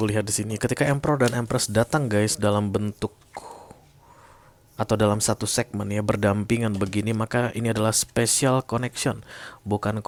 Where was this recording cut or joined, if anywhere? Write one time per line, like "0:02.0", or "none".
none